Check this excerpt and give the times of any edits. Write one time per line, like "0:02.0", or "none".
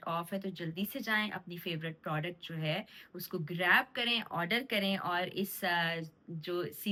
none